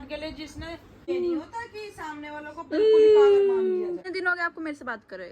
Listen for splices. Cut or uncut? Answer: cut